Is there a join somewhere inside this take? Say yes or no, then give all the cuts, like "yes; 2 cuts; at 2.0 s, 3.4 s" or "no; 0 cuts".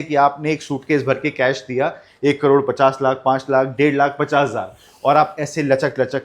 no; 0 cuts